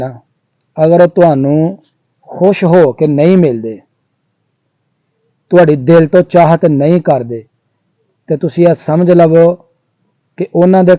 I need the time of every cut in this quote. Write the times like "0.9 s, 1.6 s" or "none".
none